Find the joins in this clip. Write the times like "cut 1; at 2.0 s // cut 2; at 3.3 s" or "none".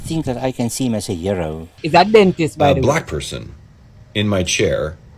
cut 1; at 1.7 s